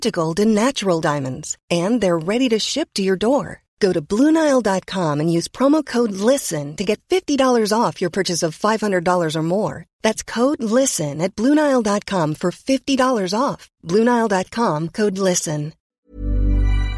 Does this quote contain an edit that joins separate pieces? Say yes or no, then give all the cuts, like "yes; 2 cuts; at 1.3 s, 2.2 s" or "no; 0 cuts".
yes; 1 cut; at 15.9 s